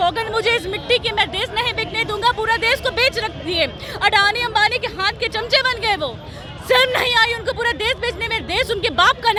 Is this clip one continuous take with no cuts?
yes; 0 cuts

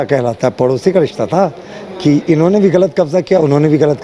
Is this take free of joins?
yes; 0 cuts

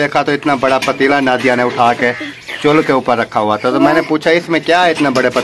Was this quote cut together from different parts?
no; 0 cuts

